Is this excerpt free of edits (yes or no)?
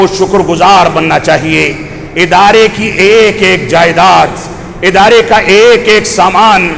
yes